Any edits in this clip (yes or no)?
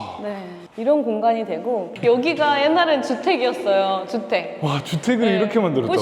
yes